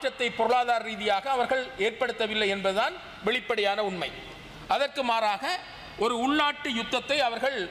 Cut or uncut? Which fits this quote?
uncut